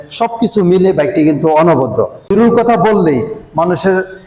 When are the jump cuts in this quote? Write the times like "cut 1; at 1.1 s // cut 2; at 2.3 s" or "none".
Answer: cut 1; at 2.3 s